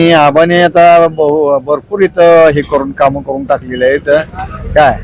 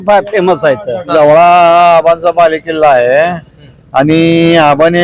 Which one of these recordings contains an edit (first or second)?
second